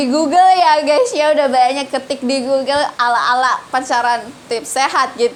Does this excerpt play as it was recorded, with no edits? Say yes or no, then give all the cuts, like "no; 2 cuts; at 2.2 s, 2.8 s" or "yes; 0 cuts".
yes; 0 cuts